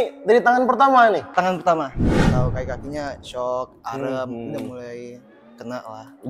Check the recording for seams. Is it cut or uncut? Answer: cut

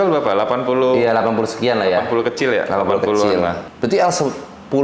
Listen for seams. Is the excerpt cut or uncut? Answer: uncut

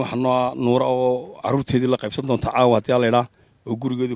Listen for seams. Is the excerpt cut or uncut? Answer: uncut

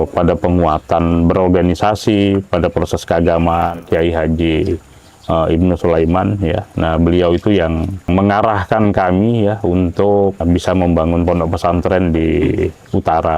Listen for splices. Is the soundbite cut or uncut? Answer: cut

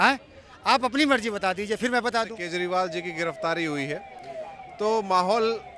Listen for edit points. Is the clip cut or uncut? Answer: cut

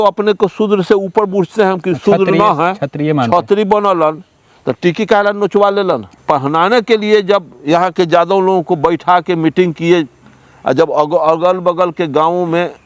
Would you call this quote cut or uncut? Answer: uncut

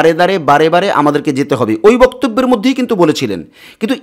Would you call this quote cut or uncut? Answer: uncut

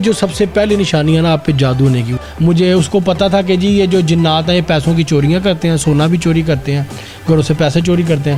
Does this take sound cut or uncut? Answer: cut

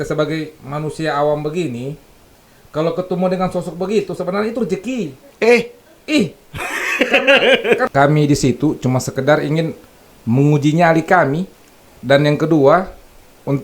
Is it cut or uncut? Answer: cut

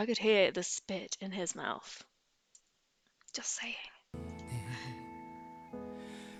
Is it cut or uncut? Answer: uncut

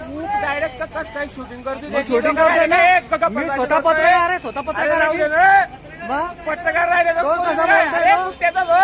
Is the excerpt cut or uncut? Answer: uncut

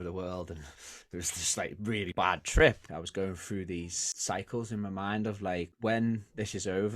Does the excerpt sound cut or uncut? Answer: cut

